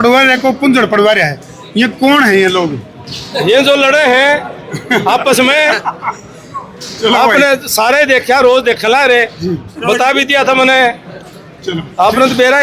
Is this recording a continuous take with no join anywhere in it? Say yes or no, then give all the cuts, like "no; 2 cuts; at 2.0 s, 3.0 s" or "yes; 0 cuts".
yes; 0 cuts